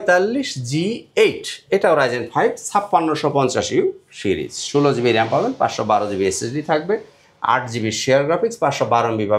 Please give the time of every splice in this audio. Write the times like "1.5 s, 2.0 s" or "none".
none